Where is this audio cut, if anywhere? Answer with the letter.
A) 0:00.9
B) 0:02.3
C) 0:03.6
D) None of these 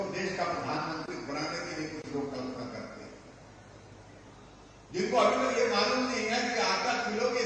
D